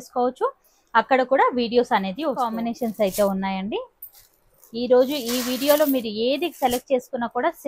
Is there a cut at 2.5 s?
yes; 1 cut; at 2.5 s

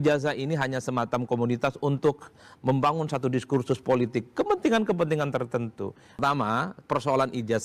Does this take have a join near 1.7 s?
no; 1 cut; at 6.2 s

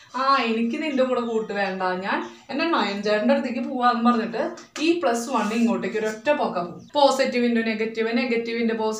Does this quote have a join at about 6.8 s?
yes; 1 cut; at 6.8 s

